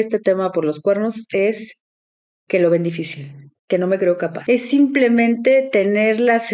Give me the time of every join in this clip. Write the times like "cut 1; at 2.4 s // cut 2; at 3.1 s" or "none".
cut 1; at 4.4 s